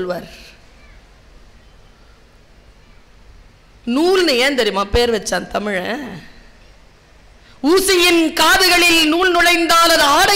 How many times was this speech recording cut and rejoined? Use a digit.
0